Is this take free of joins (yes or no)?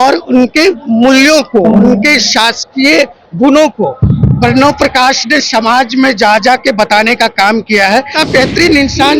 no